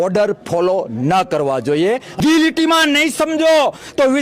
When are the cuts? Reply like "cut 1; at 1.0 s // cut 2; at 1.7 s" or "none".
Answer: cut 1; at 2.2 s